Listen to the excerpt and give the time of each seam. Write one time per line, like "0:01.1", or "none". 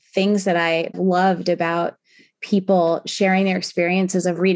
0:00.9